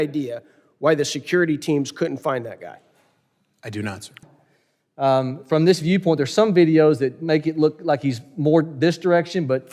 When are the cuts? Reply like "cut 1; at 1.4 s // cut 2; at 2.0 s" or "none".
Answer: cut 1; at 4.2 s